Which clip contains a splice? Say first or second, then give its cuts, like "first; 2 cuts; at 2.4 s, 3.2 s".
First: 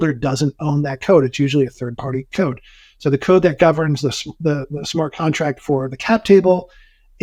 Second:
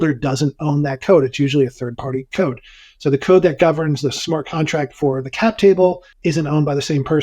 second; 2 cuts; at 4.2 s, 6.1 s